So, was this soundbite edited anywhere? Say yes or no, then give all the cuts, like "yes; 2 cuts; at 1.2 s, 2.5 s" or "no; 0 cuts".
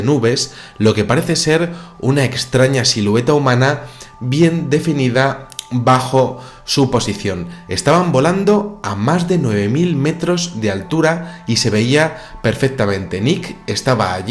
yes; 1 cut; at 2.9 s